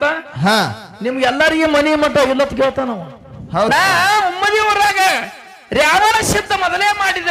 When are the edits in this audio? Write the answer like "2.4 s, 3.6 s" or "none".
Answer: 3.7 s